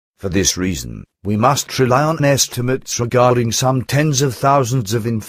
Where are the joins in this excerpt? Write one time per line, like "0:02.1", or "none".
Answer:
0:03.4